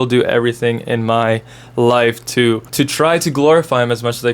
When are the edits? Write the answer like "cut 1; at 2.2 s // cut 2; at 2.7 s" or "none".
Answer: cut 1; at 2.7 s

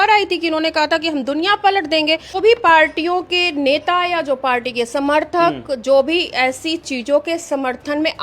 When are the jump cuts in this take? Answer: cut 1; at 2.3 s

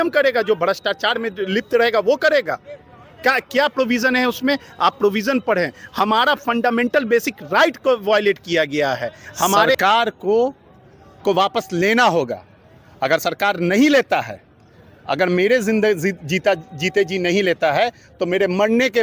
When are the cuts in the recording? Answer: cut 1; at 9.8 s

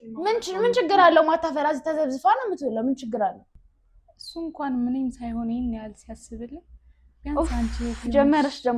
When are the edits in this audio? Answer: cut 1; at 3.5 s

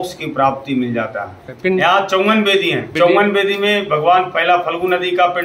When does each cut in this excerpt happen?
cut 1; at 1.5 s // cut 2; at 2.8 s

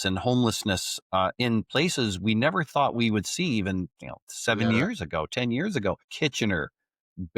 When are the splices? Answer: cut 1; at 6.1 s

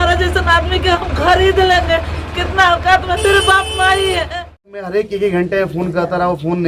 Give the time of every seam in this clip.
cut 1; at 4.8 s

